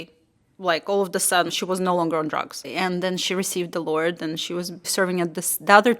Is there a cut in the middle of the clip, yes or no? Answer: yes